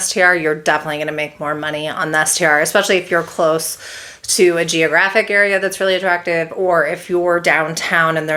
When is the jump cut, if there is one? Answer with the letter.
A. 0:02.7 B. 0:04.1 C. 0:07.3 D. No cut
D